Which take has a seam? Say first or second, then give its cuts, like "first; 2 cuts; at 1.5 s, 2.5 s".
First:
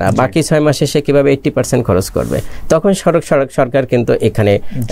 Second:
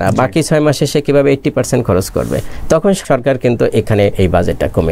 second; 2 cuts; at 3.0 s, 4.1 s